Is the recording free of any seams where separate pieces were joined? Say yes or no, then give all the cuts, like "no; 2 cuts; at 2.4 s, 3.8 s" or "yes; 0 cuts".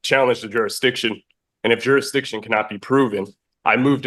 yes; 0 cuts